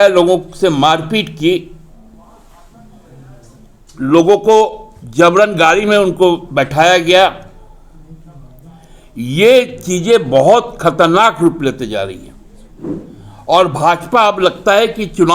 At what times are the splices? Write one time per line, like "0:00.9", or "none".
none

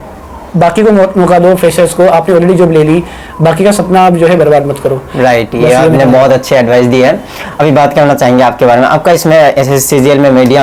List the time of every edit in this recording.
none

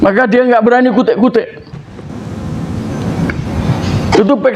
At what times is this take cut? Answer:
none

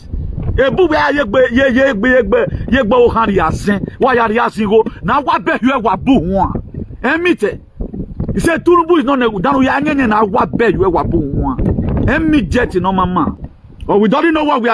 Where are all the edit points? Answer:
0:13.4

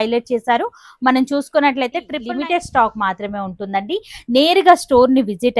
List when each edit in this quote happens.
0:02.1

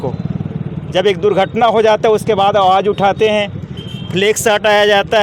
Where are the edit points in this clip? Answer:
none

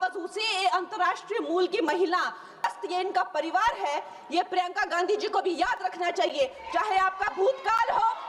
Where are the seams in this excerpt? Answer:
0:02.6

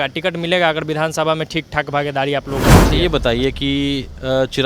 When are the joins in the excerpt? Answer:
0:02.9

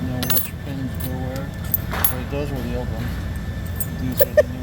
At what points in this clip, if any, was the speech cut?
0:01.8
0:03.7

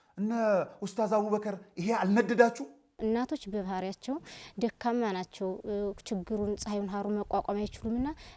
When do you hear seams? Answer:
0:02.8

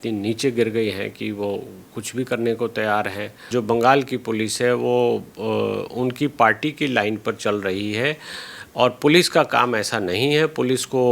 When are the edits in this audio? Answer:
0:03.4

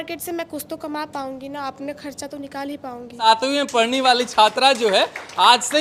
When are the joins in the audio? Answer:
0:03.2

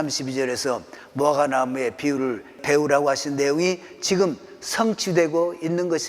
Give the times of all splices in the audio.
0:02.6

